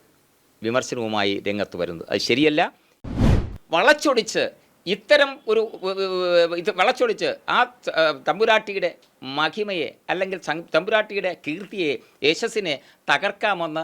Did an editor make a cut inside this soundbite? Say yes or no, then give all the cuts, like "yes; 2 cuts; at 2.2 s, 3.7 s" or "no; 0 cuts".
yes; 1 cut; at 3.2 s